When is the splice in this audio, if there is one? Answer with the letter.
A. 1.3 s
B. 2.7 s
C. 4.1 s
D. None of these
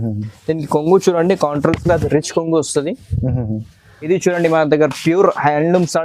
C